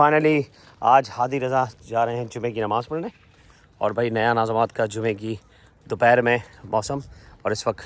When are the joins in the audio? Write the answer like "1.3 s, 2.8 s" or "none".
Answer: none